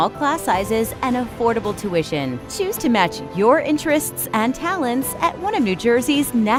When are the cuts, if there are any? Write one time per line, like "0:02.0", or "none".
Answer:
none